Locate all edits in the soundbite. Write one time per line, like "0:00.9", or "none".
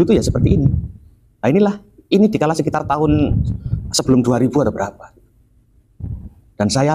none